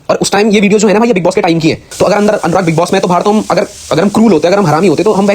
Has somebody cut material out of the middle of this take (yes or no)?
yes